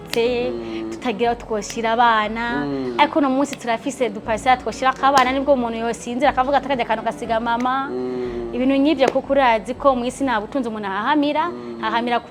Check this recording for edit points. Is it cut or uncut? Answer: uncut